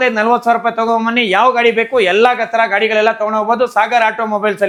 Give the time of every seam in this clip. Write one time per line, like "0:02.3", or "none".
none